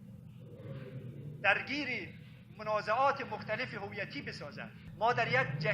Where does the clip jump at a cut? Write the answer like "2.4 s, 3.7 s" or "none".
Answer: 4.8 s

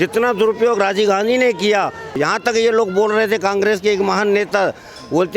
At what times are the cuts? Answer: 2.1 s

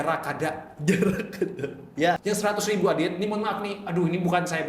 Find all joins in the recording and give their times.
2.2 s

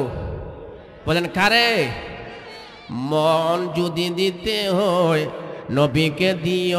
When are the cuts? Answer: none

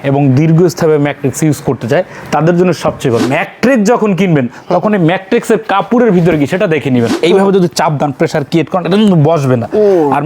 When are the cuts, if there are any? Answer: 3.3 s, 7.1 s

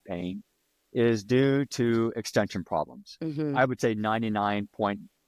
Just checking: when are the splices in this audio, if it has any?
none

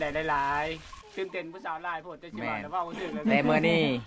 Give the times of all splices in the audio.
0.9 s

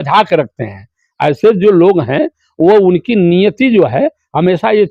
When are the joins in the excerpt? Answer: none

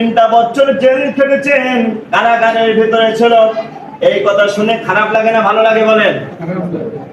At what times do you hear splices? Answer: none

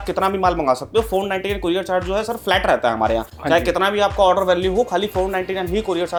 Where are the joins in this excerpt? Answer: none

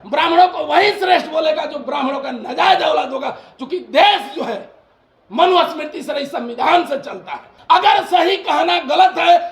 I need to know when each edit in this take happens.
7.5 s

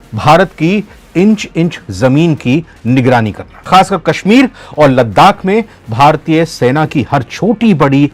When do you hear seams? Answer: 3.7 s

